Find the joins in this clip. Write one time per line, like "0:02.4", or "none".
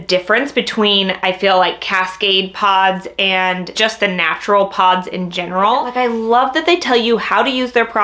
0:03.7
0:05.9